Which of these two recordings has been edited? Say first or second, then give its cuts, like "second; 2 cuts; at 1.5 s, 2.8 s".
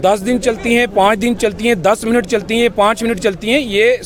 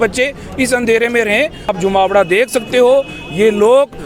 second; 1 cut; at 1.7 s